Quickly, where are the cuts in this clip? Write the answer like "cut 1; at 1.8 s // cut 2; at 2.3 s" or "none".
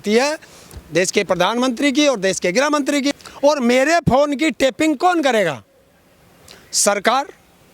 cut 1; at 3.2 s